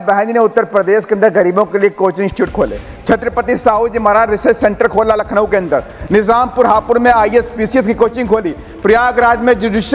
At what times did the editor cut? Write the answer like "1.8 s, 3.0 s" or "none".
none